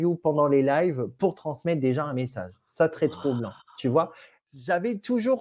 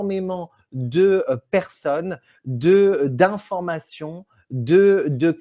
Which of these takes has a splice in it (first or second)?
first